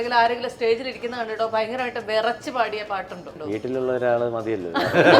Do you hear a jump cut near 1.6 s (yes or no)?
no